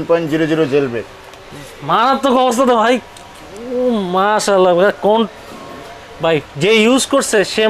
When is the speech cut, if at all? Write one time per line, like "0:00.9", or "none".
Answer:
none